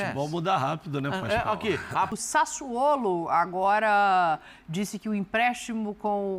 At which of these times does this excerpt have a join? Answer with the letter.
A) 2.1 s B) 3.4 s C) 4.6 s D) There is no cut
A